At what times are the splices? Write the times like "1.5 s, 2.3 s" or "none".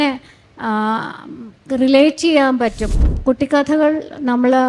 2.9 s